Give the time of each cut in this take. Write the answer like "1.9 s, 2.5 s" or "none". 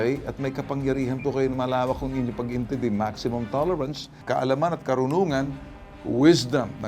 4.2 s